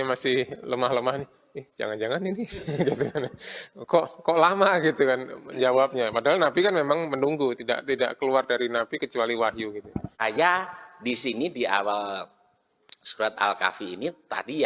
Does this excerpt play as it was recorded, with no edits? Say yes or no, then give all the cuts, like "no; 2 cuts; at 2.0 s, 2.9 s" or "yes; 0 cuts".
no; 1 cut; at 10.2 s